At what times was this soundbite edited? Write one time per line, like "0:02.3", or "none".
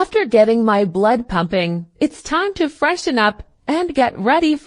0:01.9